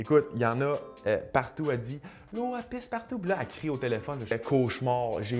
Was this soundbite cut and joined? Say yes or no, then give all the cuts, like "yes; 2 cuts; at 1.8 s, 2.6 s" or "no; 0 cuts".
yes; 1 cut; at 4.3 s